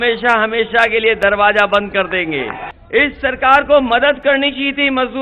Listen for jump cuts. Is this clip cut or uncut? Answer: cut